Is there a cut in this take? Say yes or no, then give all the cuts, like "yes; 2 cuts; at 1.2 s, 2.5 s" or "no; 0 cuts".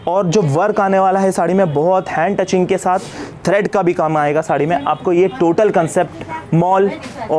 no; 0 cuts